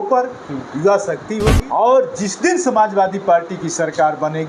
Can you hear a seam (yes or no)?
yes